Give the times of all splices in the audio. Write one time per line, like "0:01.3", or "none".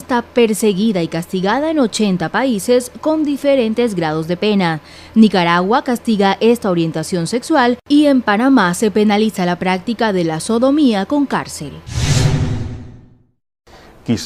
0:01.9